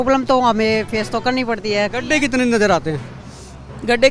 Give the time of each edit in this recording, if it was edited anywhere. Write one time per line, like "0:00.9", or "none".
0:01.9